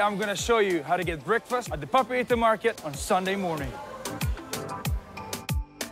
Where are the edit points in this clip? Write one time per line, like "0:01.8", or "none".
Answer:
0:03.7